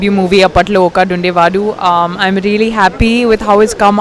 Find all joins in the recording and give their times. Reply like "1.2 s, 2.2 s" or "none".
none